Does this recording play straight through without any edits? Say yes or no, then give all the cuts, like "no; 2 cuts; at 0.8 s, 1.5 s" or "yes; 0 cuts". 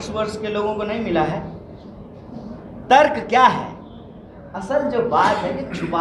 yes; 0 cuts